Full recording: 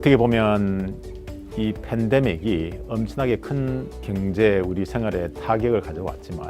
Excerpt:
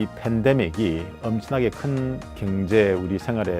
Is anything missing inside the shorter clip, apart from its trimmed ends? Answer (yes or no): no